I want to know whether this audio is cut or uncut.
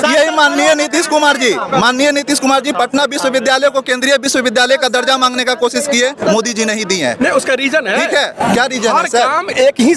uncut